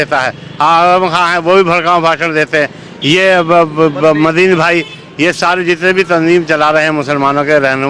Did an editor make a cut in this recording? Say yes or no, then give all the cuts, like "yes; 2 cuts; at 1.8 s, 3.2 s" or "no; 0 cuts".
no; 0 cuts